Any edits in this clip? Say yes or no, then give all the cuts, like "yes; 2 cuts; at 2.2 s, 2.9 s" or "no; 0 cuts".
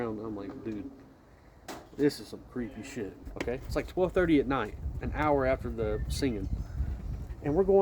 yes; 1 cut; at 3.2 s